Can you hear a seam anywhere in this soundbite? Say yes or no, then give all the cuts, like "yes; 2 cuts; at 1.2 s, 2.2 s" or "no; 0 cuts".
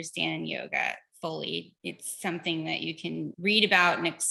yes; 1 cut; at 3.3 s